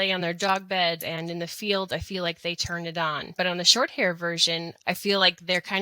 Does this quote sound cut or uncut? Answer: cut